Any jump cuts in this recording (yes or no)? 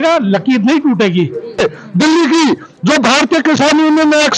yes